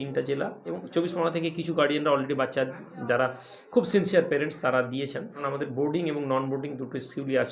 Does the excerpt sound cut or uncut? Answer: cut